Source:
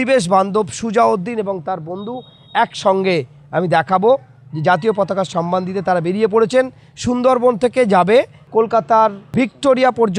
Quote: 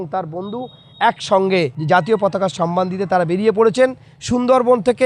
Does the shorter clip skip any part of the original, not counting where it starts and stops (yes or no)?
yes